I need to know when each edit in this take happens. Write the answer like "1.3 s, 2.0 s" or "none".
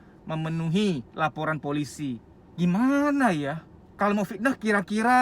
1.1 s